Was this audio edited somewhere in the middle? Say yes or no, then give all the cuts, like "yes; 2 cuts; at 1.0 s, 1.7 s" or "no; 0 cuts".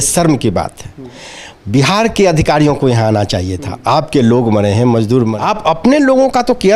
yes; 1 cut; at 5.4 s